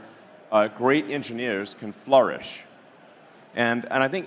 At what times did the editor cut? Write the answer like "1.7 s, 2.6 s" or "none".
none